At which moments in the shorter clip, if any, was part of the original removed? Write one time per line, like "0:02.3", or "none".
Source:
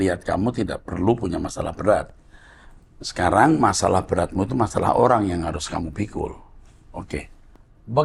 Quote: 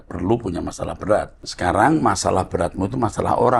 0:01.4